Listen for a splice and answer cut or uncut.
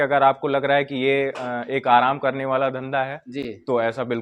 uncut